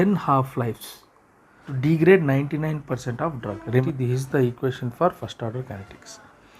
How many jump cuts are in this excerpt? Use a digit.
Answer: 2